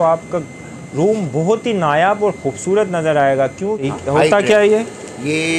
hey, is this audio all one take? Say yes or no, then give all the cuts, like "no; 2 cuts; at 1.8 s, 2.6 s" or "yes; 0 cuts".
no; 1 cut; at 3.7 s